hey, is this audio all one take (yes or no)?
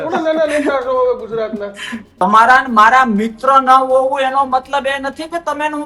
no